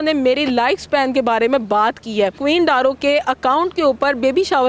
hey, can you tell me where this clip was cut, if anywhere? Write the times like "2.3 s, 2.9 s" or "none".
2.4 s